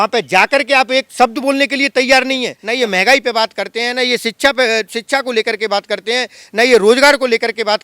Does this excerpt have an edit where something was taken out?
yes; 1 cut; at 2.6 s

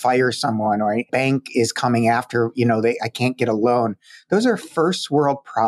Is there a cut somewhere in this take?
yes; 1 cut; at 1.1 s

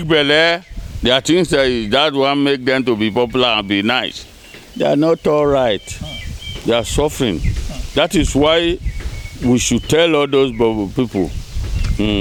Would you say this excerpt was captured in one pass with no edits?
yes; 0 cuts

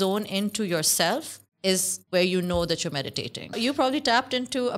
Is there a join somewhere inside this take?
yes; 2 cuts; at 1.9 s, 3.6 s

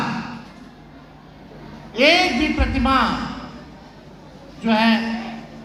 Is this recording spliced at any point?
no; 0 cuts

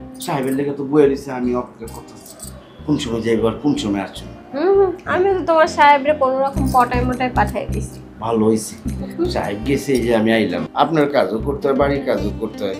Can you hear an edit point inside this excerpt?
yes; 1 cut; at 10.6 s

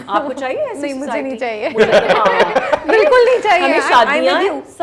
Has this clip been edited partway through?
no; 0 cuts

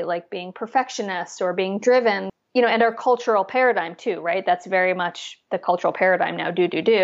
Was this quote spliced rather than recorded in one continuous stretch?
yes; 1 cut; at 2.2 s

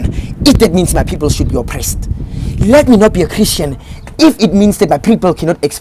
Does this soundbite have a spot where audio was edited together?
no; 0 cuts

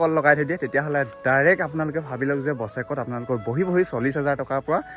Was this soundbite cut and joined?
no; 0 cuts

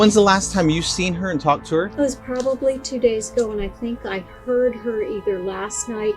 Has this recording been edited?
yes; 1 cut; at 1.9 s

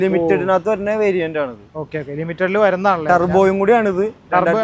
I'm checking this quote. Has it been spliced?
no; 0 cuts

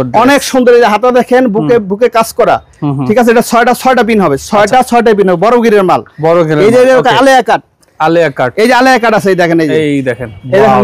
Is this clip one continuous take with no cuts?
yes; 0 cuts

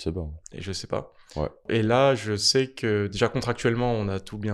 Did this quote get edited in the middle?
yes; 1 cut; at 1.6 s

